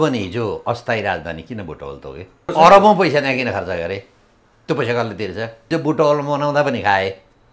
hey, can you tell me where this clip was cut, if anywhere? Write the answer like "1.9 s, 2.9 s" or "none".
2.4 s, 5.7 s